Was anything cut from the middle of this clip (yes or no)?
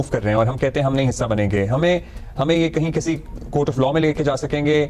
no